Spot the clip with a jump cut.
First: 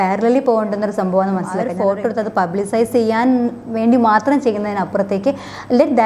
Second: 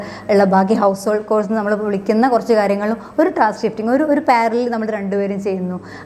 first; 1 cut; at 1.6 s

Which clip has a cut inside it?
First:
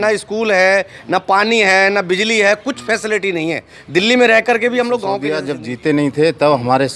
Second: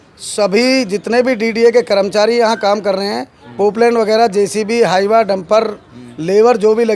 first; 1 cut; at 5.5 s

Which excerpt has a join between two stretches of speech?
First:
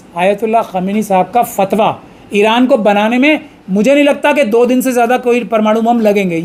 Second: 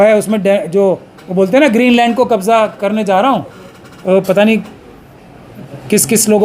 second; 1 cut; at 3.6 s

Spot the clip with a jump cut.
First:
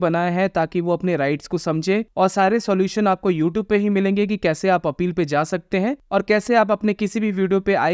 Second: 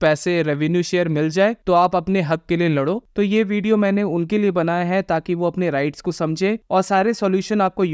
second; 1 cut; at 3.1 s

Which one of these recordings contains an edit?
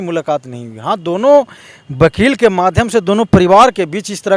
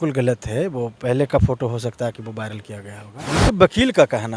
second; 1 cut; at 3.3 s

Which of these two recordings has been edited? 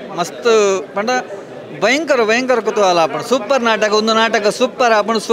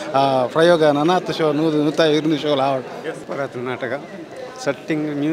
second; 1 cut; at 3.2 s

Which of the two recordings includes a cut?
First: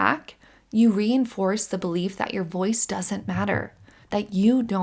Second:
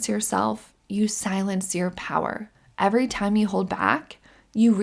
second; 1 cut; at 2.5 s

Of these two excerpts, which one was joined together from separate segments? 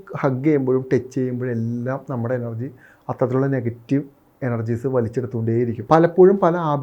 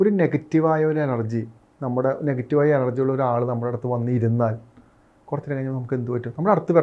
first; 1 cut; at 5.8 s

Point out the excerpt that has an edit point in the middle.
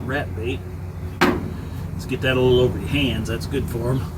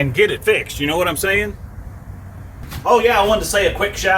second; 1 cut; at 2.3 s

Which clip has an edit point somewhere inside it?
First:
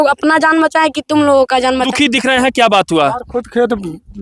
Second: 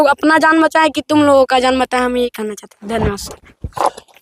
first; 1 cut; at 1.9 s

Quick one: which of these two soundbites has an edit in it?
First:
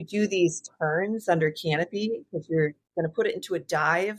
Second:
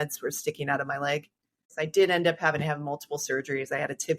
second; 1 cut; at 1.7 s

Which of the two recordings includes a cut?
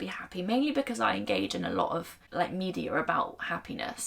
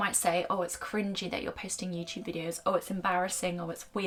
first; 1 cut; at 2.2 s

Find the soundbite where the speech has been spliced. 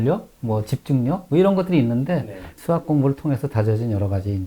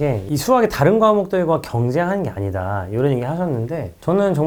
first; 1 cut; at 2.5 s

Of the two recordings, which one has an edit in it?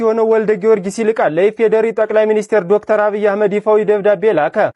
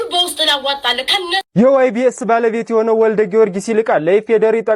second; 1 cut; at 1.5 s

